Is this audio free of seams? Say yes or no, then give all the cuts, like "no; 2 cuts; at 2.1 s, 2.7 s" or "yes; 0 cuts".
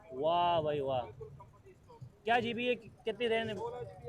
yes; 0 cuts